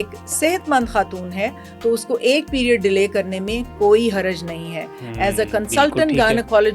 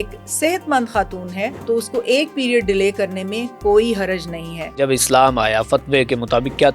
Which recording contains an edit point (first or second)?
second